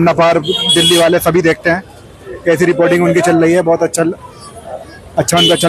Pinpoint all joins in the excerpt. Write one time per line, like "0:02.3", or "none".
none